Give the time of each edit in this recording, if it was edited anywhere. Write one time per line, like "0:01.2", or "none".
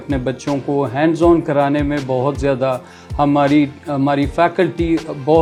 none